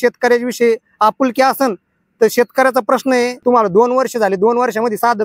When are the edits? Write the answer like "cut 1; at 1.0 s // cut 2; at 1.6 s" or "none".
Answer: cut 1; at 3.4 s